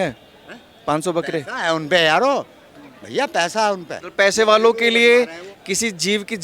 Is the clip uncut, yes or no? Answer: no